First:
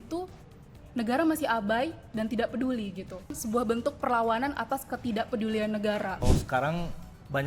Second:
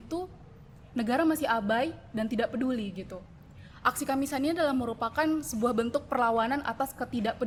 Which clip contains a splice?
first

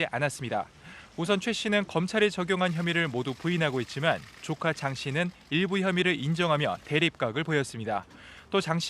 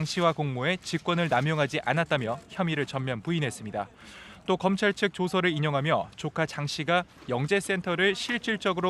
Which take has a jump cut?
first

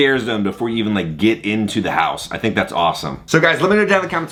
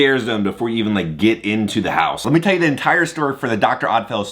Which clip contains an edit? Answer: second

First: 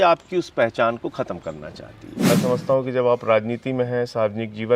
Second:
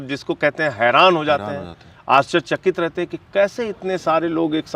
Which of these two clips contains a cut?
first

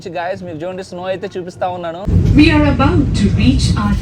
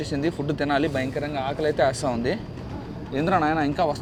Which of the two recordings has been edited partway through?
first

